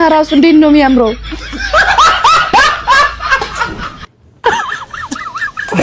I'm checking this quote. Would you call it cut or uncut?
uncut